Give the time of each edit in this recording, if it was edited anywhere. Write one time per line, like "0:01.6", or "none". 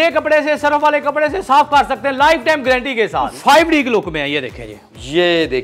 0:03.3